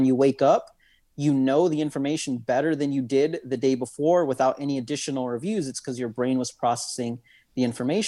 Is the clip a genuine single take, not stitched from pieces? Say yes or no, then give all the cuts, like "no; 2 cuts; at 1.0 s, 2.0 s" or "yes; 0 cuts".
yes; 0 cuts